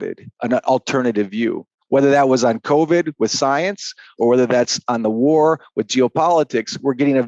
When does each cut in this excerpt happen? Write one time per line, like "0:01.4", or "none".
none